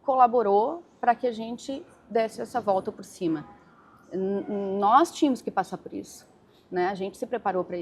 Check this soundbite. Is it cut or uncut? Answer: uncut